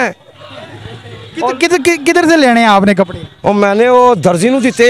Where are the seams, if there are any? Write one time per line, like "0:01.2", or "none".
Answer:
none